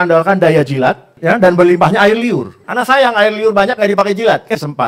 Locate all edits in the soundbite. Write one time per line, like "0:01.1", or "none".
0:01.1
0:02.6